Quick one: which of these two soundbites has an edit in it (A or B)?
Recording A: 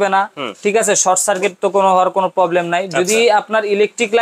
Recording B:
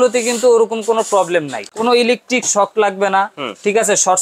B